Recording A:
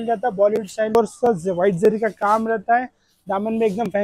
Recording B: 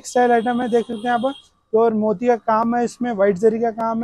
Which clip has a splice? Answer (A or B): A